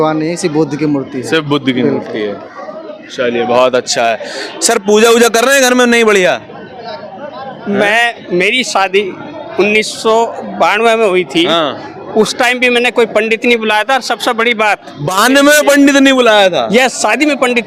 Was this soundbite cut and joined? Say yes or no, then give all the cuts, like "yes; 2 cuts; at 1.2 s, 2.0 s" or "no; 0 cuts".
no; 0 cuts